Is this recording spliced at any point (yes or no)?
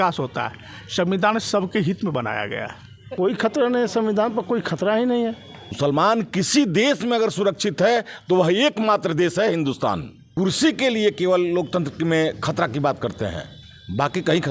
yes